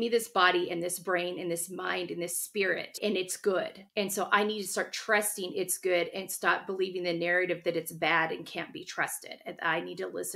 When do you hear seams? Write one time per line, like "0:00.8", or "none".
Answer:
0:03.0